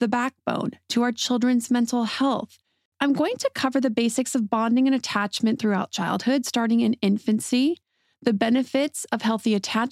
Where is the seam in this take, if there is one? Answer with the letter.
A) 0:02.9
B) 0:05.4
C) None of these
A